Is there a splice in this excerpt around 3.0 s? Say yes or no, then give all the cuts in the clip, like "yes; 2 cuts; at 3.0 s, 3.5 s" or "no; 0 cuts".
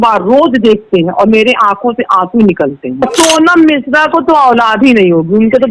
yes; 1 cut; at 3.0 s